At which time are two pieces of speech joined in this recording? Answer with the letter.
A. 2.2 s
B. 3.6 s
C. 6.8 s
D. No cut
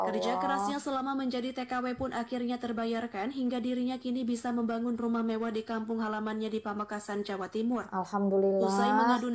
D